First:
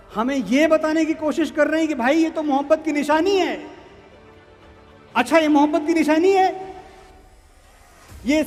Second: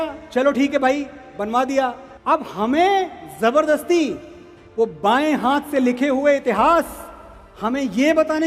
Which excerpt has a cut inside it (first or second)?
second